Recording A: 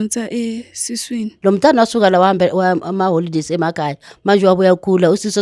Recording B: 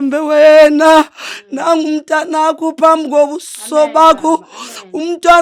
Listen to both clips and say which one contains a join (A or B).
A